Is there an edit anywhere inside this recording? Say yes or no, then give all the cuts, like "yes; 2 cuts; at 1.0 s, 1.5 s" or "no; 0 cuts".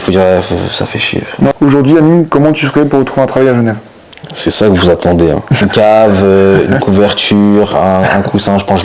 yes; 2 cuts; at 1.5 s, 5.6 s